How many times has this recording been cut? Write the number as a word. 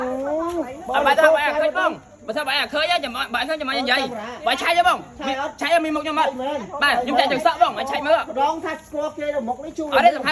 zero